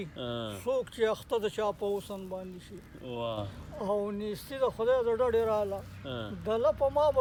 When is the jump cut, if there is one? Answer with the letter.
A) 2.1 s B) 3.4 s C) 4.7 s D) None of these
D